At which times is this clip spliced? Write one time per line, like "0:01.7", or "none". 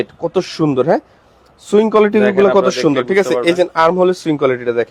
none